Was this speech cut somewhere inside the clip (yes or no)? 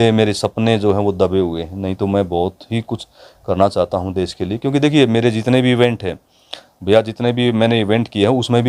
no